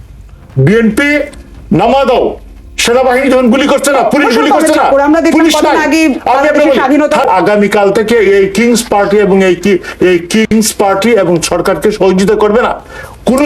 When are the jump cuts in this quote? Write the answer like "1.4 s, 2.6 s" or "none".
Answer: 7.2 s